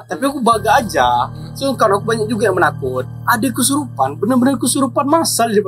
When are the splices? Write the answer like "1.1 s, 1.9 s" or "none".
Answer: 3.1 s